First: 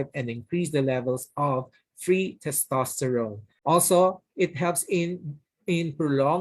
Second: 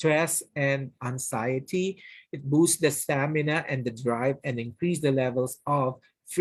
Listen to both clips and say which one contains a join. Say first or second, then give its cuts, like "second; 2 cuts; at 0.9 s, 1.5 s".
first; 1 cut; at 3.5 s